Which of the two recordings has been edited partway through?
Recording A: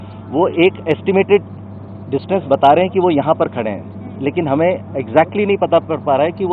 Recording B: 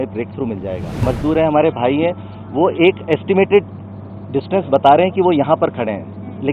B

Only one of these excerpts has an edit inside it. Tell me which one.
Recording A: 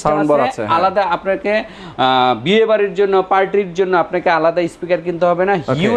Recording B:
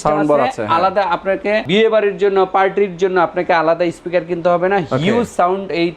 B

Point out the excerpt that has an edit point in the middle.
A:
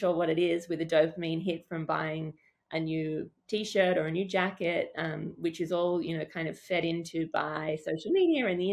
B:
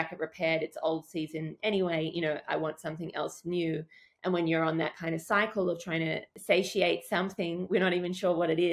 B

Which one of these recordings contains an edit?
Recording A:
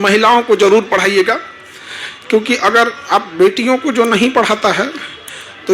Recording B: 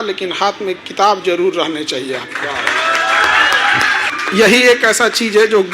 B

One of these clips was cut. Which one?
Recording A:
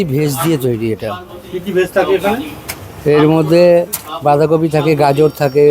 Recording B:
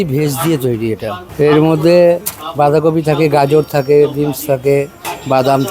B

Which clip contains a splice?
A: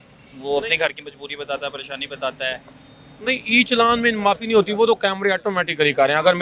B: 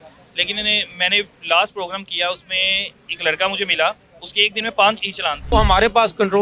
B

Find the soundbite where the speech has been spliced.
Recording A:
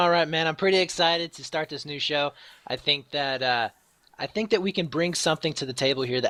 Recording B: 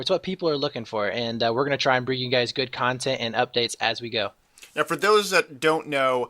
B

